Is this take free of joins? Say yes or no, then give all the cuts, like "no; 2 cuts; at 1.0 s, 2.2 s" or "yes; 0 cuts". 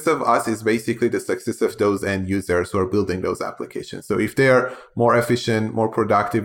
yes; 0 cuts